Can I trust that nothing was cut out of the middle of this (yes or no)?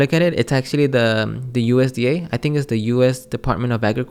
yes